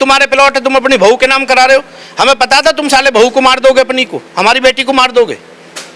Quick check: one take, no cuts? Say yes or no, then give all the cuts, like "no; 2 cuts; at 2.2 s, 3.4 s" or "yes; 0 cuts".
yes; 0 cuts